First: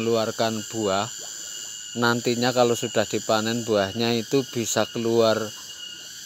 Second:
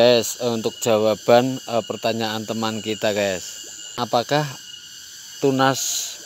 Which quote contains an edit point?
second; 1 cut; at 4.0 s

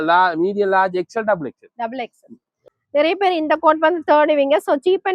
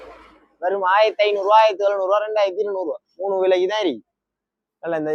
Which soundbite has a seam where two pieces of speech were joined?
first; 1 cut; at 2.6 s

